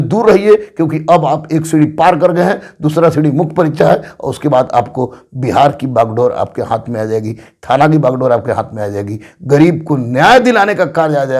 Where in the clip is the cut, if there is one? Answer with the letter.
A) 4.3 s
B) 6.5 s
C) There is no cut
C